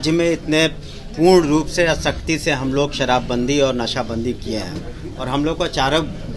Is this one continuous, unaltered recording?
yes; 0 cuts

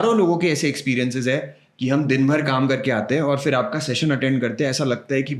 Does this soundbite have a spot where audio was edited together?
no; 0 cuts

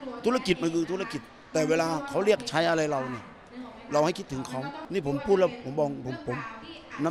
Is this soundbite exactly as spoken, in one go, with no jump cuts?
no; 1 cut; at 4.8 s

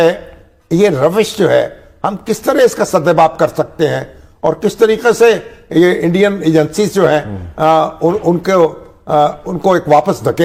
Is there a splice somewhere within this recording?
no; 0 cuts

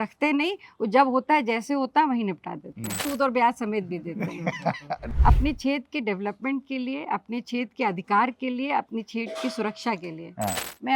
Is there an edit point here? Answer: yes; 2 cuts; at 3.0 s, 5.0 s

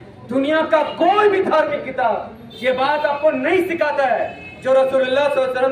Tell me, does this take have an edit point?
no; 0 cuts

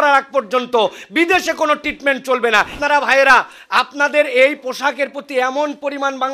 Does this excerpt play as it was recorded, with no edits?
no; 1 cut; at 2.8 s

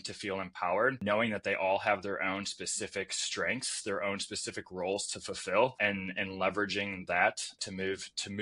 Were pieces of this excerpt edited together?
yes; 3 cuts; at 1.0 s, 5.8 s, 7.6 s

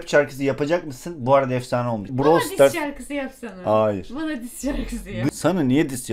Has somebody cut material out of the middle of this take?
yes; 2 cuts; at 2.1 s, 5.3 s

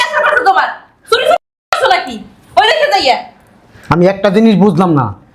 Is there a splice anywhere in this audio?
no; 0 cuts

